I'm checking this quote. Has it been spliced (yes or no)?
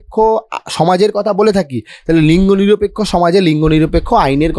no